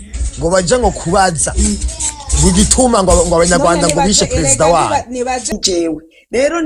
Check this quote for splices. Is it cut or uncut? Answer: cut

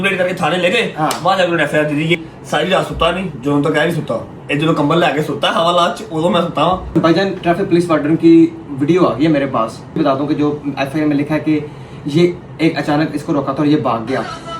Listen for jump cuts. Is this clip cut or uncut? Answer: cut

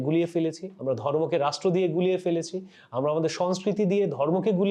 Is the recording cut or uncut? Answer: uncut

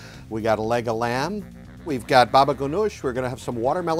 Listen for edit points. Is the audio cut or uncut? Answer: cut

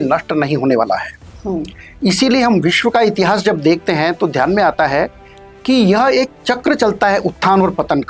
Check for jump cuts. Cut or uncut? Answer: uncut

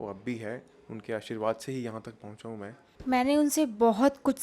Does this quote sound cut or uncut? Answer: cut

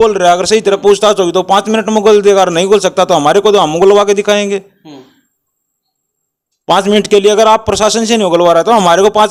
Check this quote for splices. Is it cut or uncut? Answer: uncut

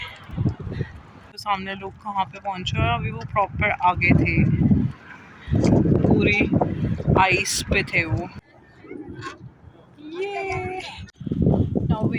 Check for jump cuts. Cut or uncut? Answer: cut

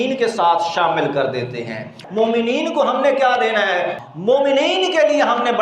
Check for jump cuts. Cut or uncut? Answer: cut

